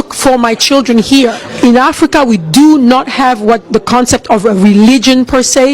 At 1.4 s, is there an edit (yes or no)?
yes